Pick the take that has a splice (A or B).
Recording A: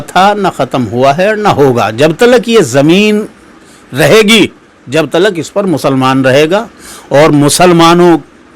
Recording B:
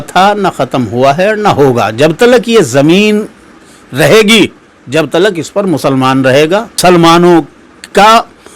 B